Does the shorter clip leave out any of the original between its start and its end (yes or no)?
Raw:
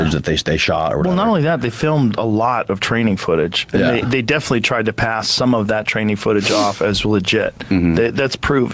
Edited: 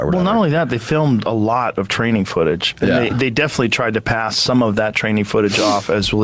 no